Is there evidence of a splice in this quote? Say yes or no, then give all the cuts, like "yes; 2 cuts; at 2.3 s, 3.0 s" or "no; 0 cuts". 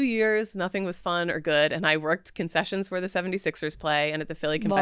no; 0 cuts